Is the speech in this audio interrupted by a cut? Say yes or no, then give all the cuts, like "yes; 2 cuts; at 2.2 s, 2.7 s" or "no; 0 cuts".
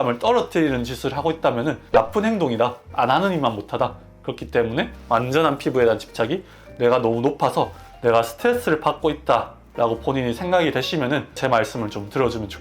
yes; 2 cuts; at 1.8 s, 5.0 s